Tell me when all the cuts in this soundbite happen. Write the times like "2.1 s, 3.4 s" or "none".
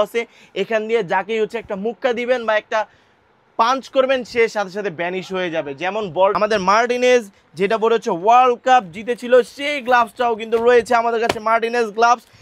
6.3 s